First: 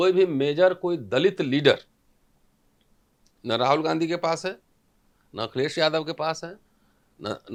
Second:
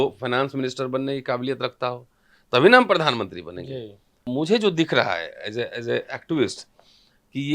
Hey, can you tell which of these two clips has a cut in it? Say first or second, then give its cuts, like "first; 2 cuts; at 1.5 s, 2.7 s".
second; 1 cut; at 4.1 s